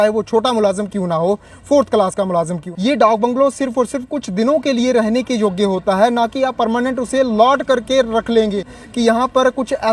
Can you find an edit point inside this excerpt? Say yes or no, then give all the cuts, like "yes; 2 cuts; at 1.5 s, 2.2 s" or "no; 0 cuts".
yes; 2 cuts; at 2.6 s, 8.8 s